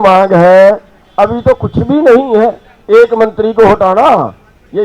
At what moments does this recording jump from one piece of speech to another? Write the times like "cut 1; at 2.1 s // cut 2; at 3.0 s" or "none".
cut 1; at 2.7 s